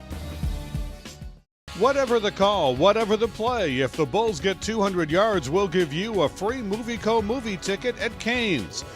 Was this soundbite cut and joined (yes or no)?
yes